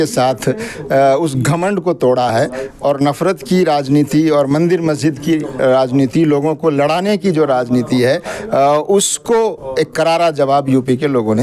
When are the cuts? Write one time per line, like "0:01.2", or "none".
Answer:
none